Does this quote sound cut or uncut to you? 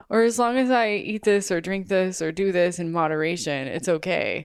uncut